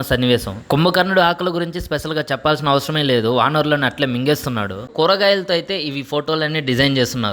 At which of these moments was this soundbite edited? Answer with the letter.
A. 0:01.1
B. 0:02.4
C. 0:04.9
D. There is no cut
C